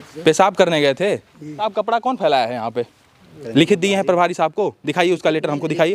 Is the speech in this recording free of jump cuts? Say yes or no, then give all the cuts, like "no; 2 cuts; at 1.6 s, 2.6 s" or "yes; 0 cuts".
no; 2 cuts; at 1.7 s, 3.4 s